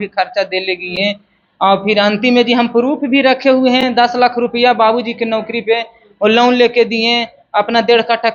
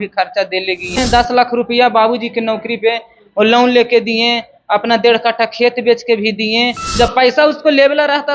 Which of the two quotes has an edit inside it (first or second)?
second